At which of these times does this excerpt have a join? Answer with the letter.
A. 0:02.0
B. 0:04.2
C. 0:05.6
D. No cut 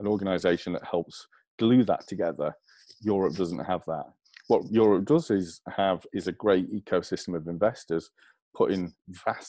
B